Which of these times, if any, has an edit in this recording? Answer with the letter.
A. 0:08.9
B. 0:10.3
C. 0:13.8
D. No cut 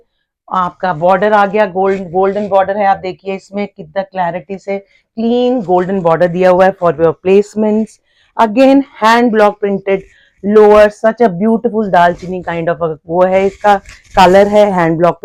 D